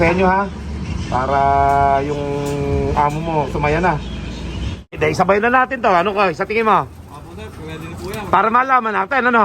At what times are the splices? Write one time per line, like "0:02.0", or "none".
0:04.9